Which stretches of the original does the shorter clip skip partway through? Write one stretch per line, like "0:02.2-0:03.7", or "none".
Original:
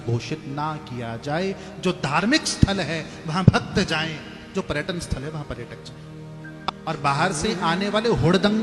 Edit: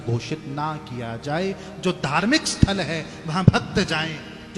none